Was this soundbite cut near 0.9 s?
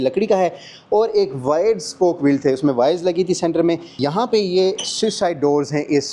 no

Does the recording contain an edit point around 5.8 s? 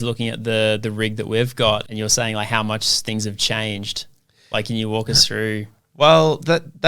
no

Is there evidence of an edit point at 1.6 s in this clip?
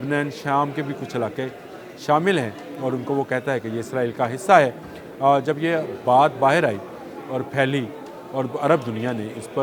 no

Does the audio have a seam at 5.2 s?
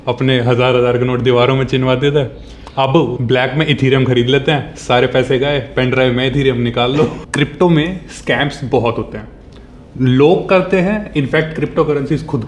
no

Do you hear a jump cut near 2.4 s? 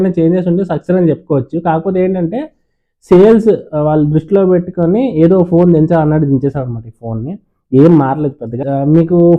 no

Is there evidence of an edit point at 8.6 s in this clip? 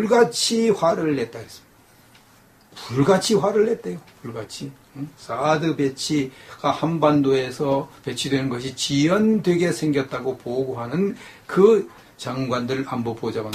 yes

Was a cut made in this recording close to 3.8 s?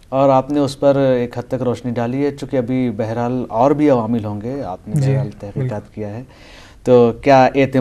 no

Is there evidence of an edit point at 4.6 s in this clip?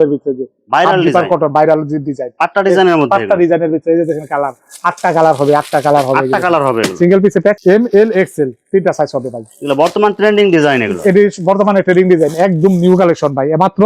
no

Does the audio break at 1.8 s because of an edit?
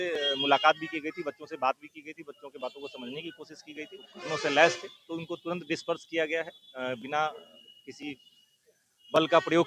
no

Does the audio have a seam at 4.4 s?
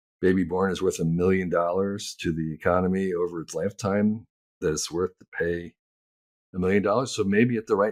no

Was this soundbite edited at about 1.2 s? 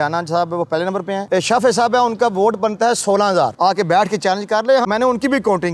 yes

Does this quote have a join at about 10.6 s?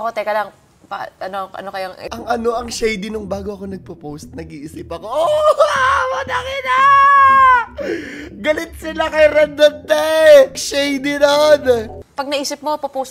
yes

